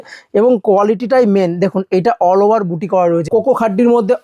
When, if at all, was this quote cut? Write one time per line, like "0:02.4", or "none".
0:03.3